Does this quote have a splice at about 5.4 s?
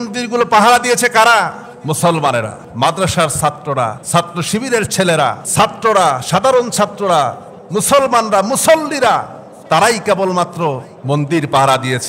yes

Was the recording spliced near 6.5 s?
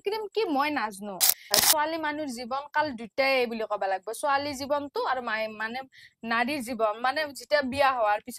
no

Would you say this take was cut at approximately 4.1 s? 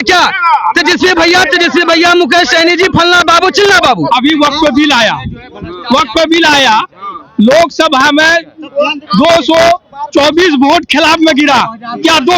yes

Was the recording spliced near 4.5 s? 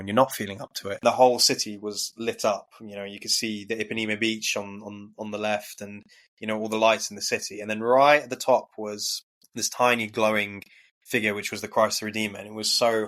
no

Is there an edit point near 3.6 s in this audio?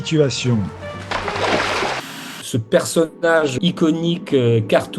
yes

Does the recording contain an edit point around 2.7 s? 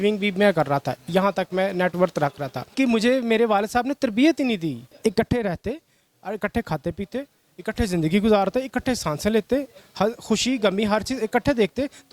yes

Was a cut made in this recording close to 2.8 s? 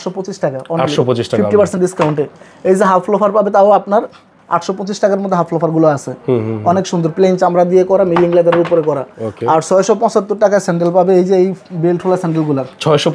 no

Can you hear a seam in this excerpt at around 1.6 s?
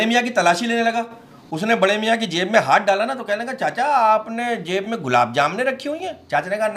no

